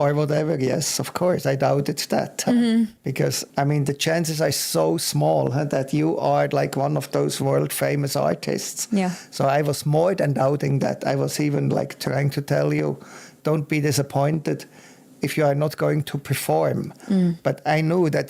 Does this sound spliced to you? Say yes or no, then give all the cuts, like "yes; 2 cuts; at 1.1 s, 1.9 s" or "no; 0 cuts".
yes; 1 cut; at 3.4 s